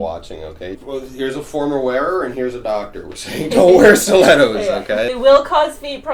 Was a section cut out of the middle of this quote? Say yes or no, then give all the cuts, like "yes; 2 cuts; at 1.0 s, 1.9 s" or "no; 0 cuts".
yes; 2 cuts; at 0.8 s, 5.1 s